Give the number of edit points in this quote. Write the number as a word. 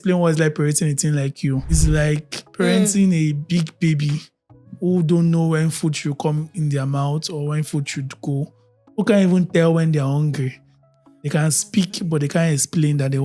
one